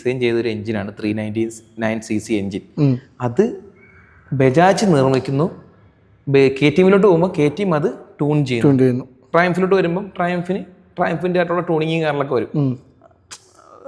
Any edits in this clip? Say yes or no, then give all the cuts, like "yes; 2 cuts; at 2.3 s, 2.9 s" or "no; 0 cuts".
yes; 1 cut; at 9.2 s